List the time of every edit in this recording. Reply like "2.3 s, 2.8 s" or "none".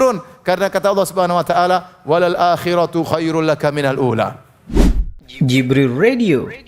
4.5 s